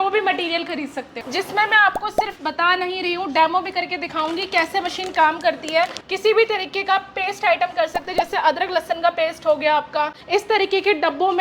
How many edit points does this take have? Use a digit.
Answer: 3